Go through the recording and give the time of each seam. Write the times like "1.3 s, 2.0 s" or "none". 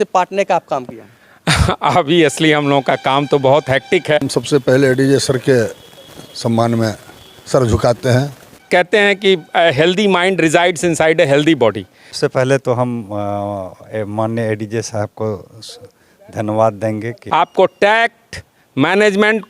4.2 s, 8.6 s, 12.0 s, 17.2 s